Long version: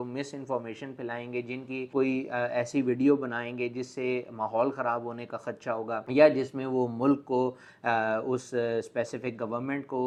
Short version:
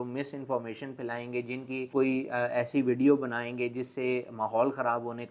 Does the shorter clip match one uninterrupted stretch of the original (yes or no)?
yes